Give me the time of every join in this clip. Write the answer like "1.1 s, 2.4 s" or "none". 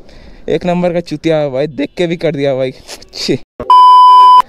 3.5 s